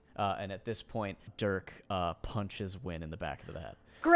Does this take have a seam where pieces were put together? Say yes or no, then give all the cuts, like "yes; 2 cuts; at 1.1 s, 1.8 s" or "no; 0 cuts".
yes; 1 cut; at 1.3 s